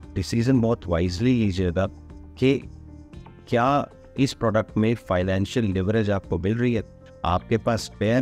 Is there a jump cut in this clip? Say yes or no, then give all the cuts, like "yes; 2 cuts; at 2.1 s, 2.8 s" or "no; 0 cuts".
yes; 1 cut; at 7.1 s